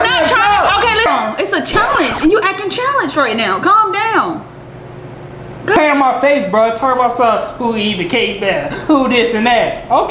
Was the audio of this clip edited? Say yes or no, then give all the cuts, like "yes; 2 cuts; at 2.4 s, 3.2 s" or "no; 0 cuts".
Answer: yes; 2 cuts; at 1.1 s, 5.8 s